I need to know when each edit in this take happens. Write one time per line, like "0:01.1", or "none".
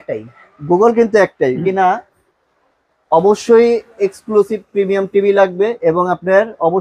0:01.6